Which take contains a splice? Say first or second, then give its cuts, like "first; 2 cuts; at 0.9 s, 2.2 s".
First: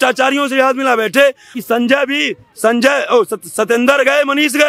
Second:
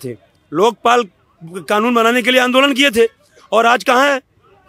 first; 1 cut; at 1.5 s